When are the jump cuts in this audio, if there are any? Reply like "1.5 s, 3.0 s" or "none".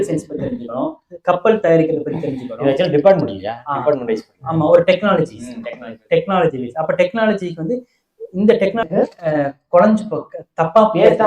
8.8 s